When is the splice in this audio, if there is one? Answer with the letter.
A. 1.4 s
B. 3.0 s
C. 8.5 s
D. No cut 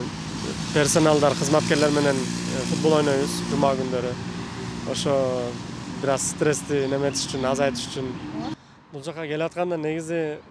C